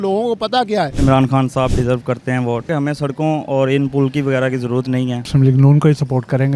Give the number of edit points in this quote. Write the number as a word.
three